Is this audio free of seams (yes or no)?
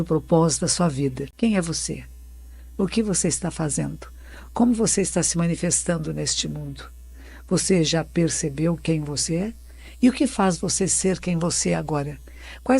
no